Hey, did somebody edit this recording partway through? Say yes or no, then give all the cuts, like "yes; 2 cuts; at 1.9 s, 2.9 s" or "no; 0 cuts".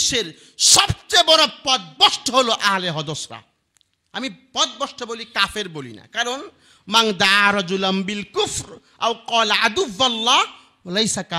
no; 0 cuts